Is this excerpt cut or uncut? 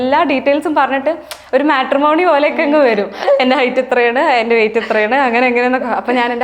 cut